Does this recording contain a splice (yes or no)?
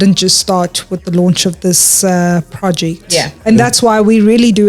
yes